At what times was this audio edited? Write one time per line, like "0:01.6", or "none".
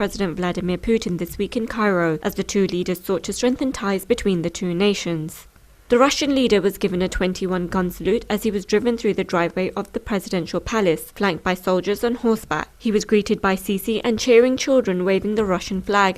0:05.4